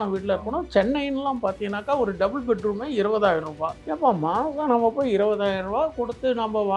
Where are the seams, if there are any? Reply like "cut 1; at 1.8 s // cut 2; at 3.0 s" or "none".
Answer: cut 1; at 3.7 s